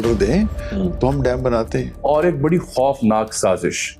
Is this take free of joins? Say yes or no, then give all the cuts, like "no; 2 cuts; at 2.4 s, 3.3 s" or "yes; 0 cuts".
no; 1 cut; at 1.9 s